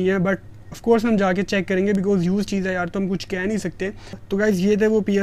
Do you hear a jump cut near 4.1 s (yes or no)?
yes